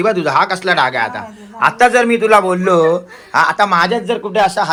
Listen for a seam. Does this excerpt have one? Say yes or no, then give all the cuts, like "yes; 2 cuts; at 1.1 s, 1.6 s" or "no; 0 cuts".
no; 0 cuts